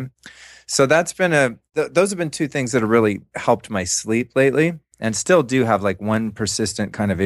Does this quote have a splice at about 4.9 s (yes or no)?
yes